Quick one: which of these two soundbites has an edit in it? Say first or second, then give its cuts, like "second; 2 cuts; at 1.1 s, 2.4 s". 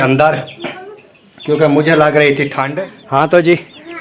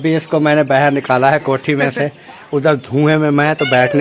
first; 1 cut; at 2.6 s